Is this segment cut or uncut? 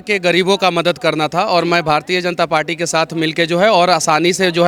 uncut